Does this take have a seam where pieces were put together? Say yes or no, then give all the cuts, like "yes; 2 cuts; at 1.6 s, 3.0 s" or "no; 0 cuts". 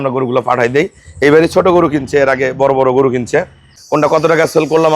yes; 1 cut; at 3.7 s